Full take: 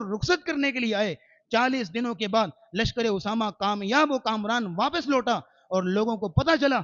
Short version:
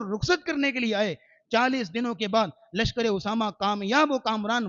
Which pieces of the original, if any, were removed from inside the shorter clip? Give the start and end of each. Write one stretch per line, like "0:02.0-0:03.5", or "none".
none